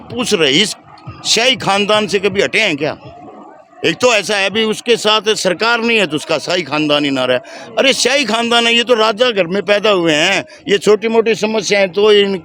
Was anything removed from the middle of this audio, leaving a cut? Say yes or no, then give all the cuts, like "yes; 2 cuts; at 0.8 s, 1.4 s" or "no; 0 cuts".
no; 0 cuts